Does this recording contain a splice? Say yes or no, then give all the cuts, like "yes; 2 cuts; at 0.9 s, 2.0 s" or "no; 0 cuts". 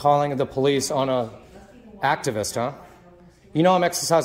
no; 0 cuts